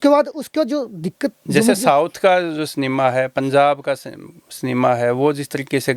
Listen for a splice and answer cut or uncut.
uncut